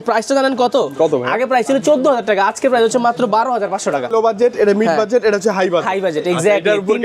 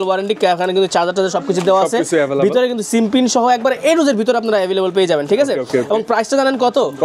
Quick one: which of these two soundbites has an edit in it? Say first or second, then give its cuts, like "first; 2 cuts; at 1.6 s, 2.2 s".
first; 1 cut; at 4.1 s